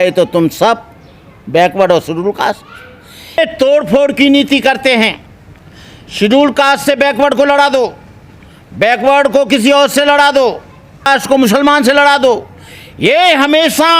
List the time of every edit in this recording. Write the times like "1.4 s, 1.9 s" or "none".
3.4 s, 11.1 s